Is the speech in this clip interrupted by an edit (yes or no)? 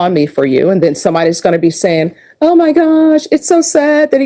no